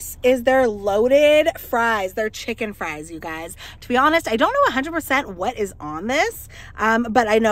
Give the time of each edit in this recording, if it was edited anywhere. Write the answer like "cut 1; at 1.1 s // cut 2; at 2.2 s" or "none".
none